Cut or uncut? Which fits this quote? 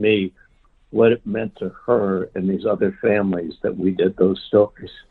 uncut